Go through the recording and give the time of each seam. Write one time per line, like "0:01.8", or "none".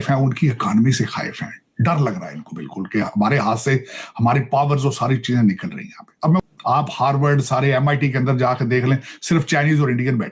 0:06.4